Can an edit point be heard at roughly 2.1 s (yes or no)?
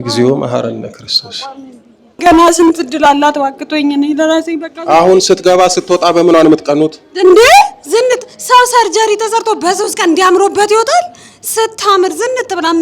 no